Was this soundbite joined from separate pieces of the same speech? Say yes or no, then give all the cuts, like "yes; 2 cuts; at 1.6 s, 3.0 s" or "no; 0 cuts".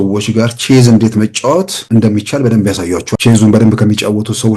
yes; 2 cuts; at 1.8 s, 3.1 s